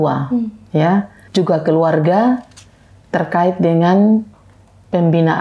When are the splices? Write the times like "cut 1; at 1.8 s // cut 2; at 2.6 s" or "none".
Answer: cut 1; at 1.2 s